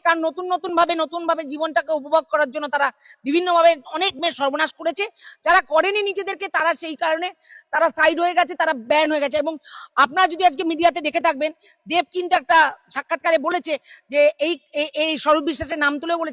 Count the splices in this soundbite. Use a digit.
0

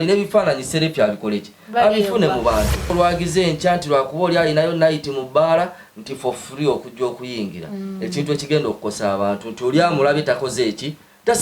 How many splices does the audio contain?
1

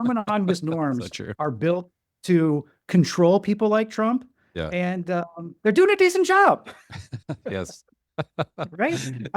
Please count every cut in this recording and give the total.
0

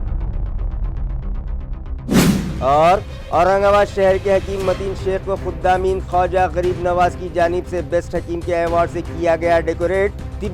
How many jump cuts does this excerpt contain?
0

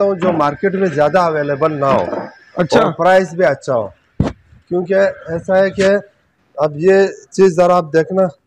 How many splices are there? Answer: 0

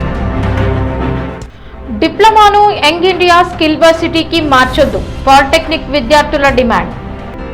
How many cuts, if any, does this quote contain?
1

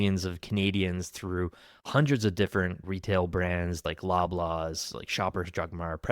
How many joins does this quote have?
2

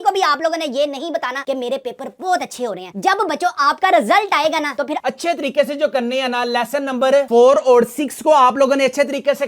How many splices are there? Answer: 1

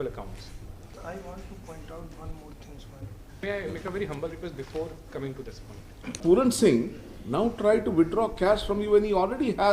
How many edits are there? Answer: 3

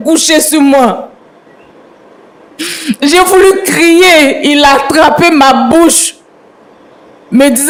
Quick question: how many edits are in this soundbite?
0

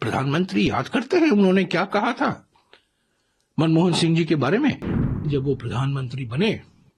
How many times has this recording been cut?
1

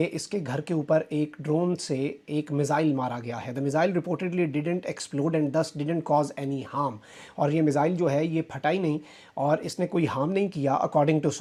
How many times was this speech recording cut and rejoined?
0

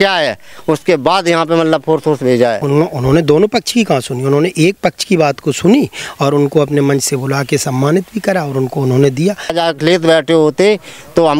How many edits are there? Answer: 2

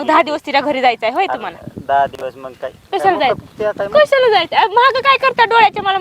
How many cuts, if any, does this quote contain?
0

